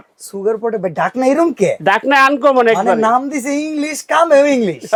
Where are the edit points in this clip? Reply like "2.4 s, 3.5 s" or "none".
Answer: none